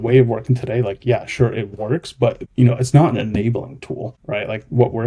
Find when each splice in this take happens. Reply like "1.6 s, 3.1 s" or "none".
2.4 s, 4.1 s